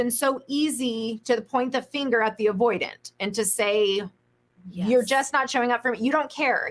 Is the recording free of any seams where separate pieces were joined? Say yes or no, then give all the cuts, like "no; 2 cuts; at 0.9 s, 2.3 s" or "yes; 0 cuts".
yes; 0 cuts